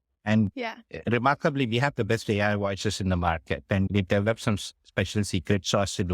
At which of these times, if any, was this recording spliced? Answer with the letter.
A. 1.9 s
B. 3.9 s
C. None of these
B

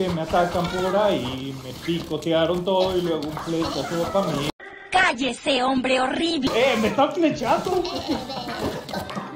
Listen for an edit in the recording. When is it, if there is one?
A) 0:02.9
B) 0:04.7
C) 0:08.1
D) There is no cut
D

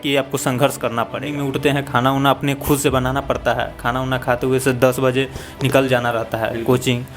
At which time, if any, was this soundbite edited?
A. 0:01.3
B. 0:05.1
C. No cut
A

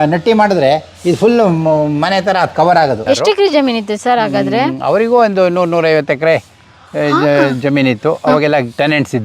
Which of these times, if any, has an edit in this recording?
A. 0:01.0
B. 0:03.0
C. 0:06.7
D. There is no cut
B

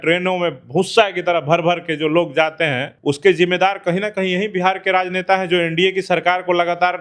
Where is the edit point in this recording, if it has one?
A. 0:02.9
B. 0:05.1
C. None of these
A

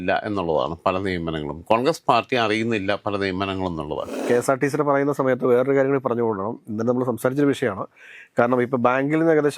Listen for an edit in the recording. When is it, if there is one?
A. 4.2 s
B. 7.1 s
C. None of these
A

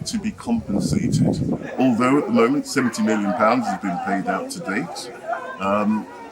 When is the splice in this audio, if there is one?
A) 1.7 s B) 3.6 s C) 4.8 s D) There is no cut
A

